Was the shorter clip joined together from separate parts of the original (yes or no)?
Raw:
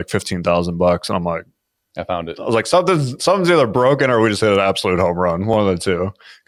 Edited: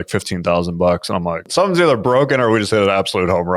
yes